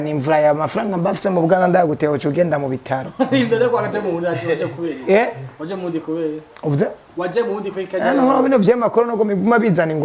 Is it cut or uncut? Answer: uncut